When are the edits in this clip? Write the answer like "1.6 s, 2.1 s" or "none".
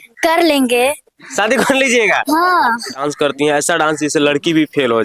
3.0 s

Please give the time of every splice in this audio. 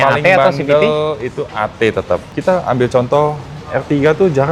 none

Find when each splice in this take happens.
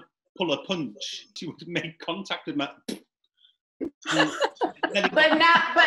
1.4 s

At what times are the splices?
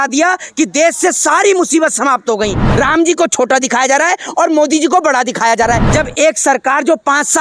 2.7 s, 5.9 s

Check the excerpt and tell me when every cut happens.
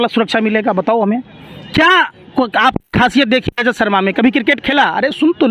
none

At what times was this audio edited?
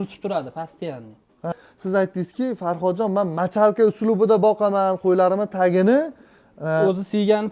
1.5 s

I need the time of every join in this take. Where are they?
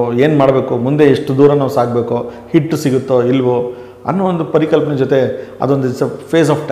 none

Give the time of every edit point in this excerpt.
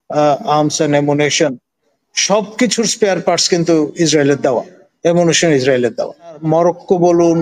6.4 s

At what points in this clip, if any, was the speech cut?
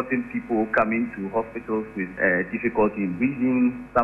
2.2 s

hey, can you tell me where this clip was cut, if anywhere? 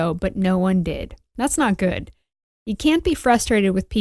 2.4 s

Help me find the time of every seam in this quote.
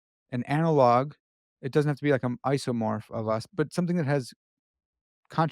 3.5 s

